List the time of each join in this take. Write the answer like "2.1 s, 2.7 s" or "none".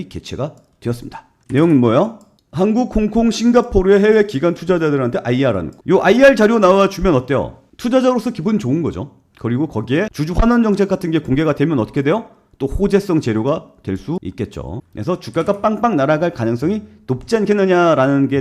2.3 s, 5.7 s